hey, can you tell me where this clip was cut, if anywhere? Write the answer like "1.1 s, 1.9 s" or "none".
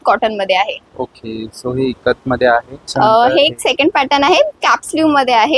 2.9 s